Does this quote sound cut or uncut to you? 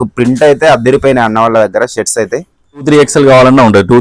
cut